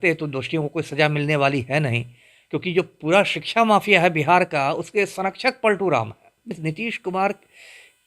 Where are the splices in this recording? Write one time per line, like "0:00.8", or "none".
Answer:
0:06.5

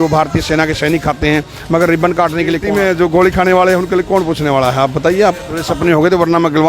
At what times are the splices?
0:02.6
0:05.7

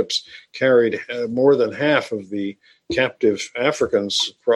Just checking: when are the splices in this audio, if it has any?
none

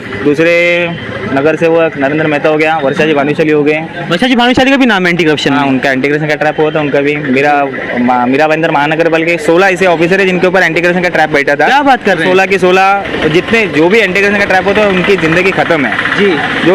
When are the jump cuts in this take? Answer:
none

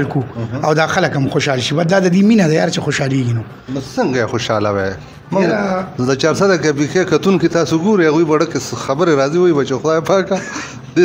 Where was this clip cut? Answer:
none

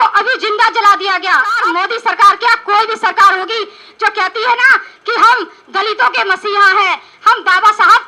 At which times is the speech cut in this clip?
0:01.6

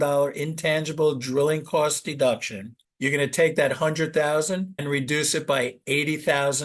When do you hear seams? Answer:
0:02.8

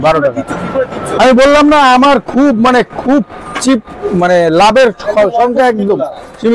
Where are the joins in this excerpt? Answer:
none

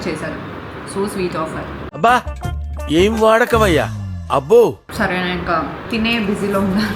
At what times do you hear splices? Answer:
0:04.8
0:05.8

